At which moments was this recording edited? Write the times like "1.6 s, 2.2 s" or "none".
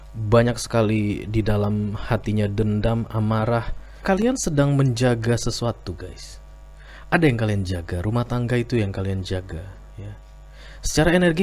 4.0 s

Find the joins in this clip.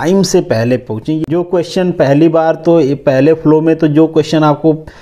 1.1 s

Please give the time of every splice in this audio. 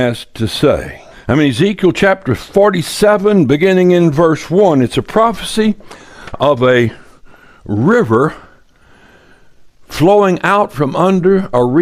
none

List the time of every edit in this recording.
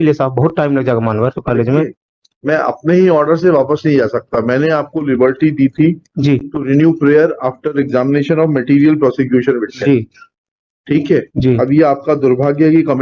1.4 s

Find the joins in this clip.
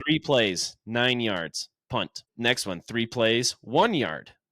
2.2 s

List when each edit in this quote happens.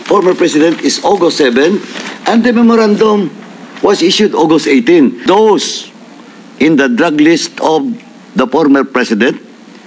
5.2 s

